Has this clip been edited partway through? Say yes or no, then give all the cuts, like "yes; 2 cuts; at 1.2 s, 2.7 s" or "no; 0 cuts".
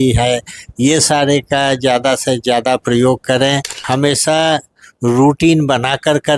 yes; 1 cut; at 3.7 s